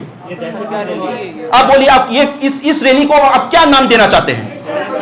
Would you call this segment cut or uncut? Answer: uncut